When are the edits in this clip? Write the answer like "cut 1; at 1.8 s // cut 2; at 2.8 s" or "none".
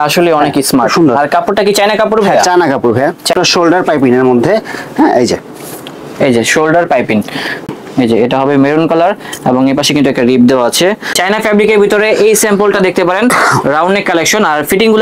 cut 1; at 3.3 s // cut 2; at 7.6 s // cut 3; at 11.1 s